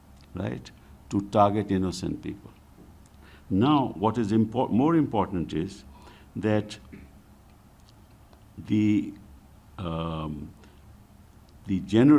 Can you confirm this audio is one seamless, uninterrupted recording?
yes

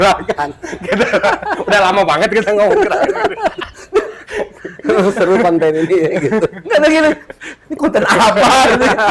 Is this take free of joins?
yes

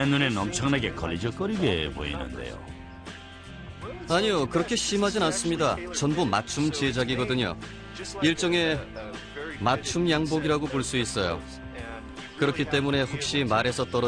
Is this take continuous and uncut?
no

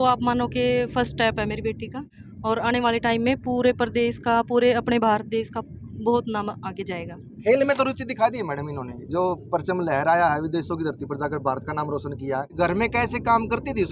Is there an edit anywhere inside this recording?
no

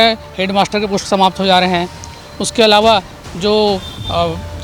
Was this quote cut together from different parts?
no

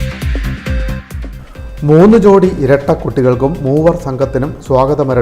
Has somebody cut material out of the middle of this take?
no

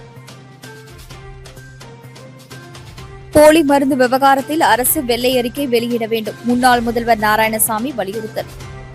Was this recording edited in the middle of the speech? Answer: yes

